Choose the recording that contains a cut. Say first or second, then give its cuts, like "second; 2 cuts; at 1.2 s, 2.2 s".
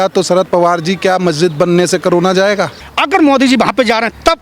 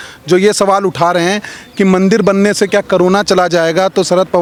first; 1 cut; at 2.9 s